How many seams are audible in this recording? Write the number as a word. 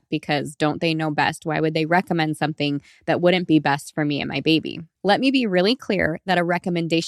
one